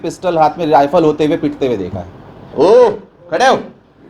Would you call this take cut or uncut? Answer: cut